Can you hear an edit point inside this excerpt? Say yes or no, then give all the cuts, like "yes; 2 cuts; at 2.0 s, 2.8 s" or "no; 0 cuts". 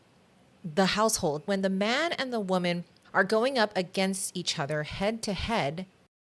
yes; 1 cut; at 1.4 s